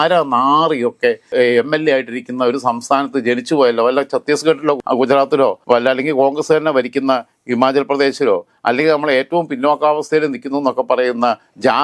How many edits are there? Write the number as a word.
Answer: zero